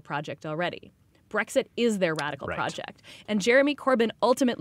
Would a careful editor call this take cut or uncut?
uncut